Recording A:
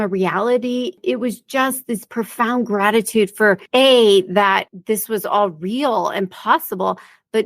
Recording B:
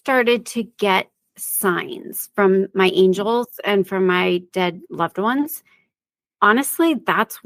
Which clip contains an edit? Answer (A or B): A